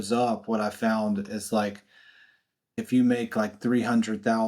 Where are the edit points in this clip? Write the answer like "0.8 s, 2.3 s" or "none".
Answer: 2.8 s